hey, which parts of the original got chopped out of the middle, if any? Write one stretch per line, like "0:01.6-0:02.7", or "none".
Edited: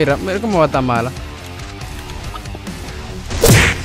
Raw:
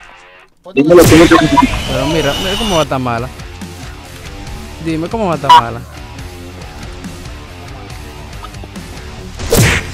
0:03.3-0:07.2